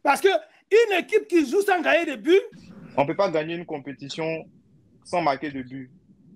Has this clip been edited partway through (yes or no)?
yes